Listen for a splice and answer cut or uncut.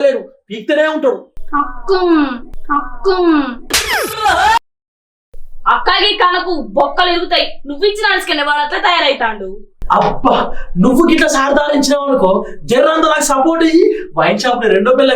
cut